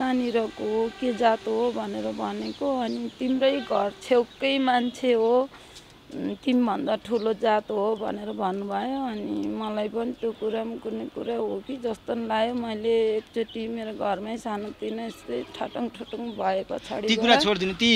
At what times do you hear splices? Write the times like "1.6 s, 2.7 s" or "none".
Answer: none